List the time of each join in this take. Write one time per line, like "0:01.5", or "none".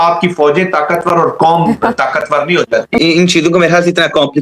0:03.1